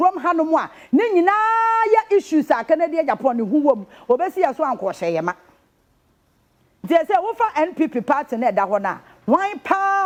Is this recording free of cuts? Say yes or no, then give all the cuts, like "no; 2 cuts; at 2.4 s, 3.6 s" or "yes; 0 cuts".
yes; 0 cuts